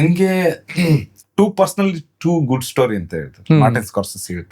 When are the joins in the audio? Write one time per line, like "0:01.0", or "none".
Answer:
0:01.2